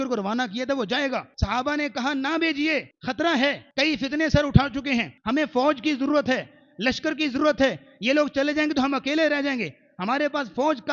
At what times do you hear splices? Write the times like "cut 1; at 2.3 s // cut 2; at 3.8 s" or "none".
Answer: cut 1; at 1.3 s // cut 2; at 3.0 s // cut 3; at 3.6 s // cut 4; at 5.1 s